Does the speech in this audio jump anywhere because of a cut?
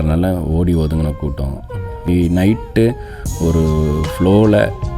yes; 1 cut; at 2.1 s

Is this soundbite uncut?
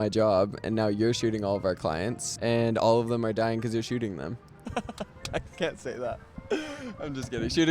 no; 1 cut; at 2.2 s

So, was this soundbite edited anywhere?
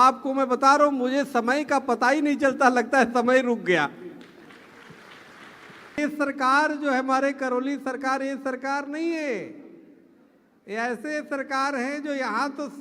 yes; 1 cut; at 6.0 s

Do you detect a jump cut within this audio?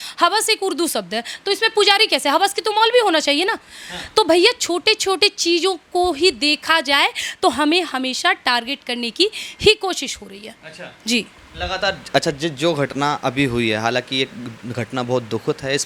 no; 0 cuts

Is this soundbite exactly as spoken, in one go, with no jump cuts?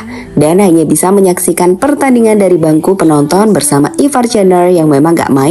yes; 0 cuts

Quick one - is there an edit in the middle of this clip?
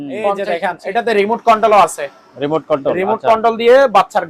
no; 0 cuts

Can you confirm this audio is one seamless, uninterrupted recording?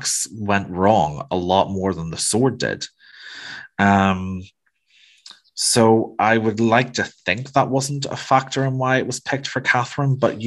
yes; 0 cuts

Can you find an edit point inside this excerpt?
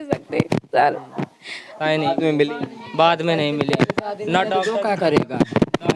yes; 1 cut; at 1.8 s

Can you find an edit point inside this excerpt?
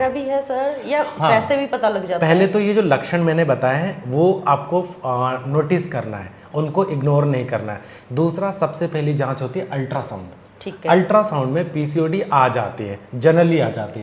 no; 0 cuts

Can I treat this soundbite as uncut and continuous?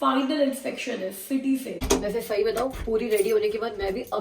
no; 1 cut; at 1.8 s

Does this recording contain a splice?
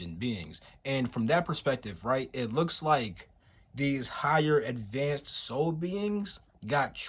no; 0 cuts

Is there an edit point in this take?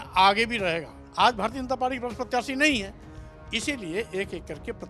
yes; 1 cut; at 1.0 s

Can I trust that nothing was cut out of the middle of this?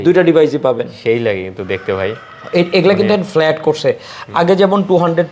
yes; 0 cuts

